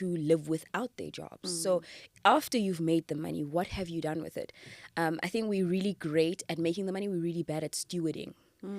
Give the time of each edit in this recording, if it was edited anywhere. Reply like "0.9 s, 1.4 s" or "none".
none

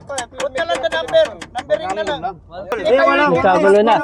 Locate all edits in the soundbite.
2.7 s

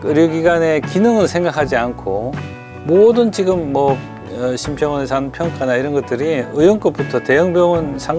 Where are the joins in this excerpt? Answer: none

